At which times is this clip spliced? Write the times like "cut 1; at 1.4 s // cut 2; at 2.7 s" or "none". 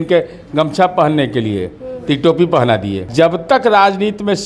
cut 1; at 3.1 s